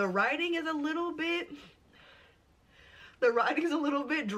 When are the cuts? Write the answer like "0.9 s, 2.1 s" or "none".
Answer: none